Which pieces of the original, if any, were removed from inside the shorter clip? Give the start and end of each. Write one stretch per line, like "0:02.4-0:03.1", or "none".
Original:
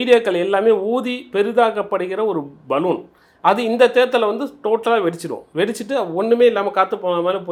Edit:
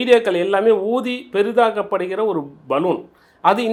none